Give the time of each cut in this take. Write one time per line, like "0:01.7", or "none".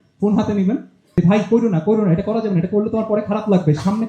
0:01.1